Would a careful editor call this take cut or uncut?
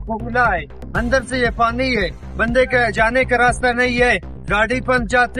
uncut